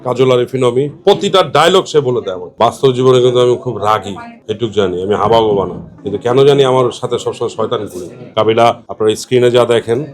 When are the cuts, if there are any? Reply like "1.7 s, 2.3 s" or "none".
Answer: 2.4 s, 5.9 s